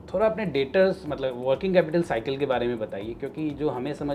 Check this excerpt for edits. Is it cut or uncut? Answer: uncut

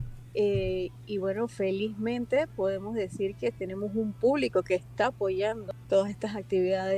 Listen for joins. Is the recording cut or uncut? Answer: cut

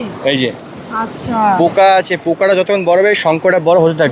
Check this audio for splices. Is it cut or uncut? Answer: uncut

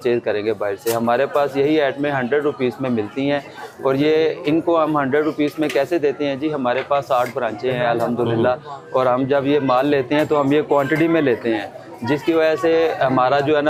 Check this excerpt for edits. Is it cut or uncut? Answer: uncut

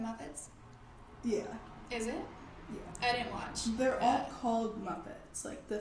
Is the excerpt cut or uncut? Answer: uncut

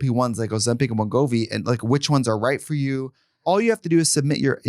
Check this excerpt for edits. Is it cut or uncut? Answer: cut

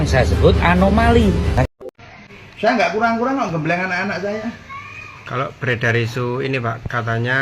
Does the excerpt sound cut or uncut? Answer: cut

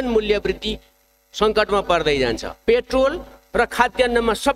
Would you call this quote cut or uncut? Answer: uncut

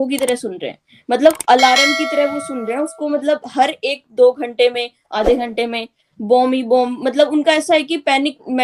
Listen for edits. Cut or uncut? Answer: uncut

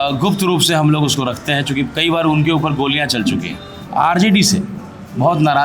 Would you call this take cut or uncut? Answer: cut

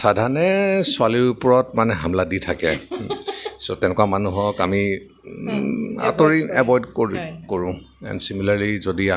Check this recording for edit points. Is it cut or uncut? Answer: uncut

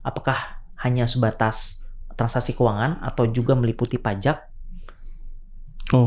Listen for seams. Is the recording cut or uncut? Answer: uncut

